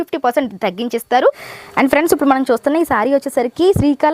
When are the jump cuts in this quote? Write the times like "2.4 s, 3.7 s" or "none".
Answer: 1.5 s